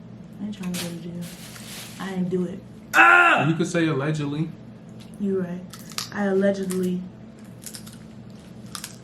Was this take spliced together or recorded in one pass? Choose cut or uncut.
uncut